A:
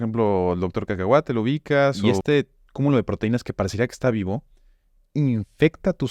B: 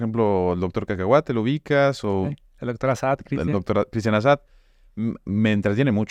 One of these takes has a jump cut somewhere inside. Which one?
A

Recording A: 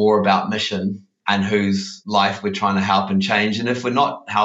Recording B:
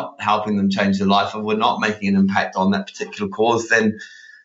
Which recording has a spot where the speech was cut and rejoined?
A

